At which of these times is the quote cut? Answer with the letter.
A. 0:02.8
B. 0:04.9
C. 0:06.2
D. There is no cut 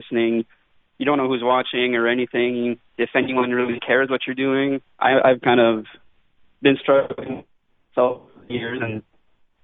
B